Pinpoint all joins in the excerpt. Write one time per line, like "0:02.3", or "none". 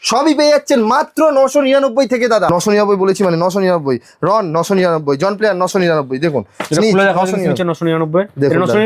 0:02.5